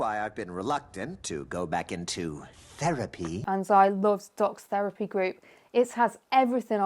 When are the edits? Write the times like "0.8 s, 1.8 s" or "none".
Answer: 3.4 s